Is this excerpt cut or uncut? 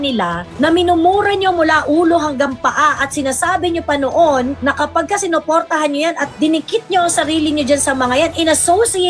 uncut